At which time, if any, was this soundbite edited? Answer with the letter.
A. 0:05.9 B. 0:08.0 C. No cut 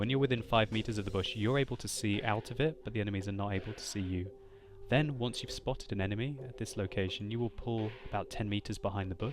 B